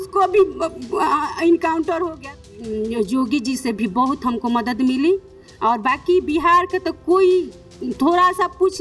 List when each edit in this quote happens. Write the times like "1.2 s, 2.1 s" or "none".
2.4 s